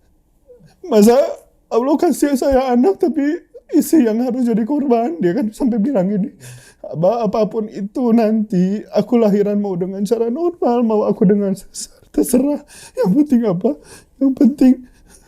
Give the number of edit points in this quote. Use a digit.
0